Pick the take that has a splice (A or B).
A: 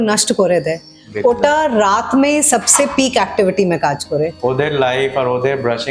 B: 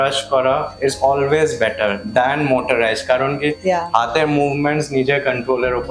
A